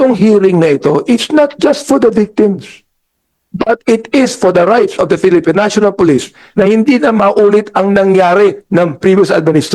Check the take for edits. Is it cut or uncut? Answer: uncut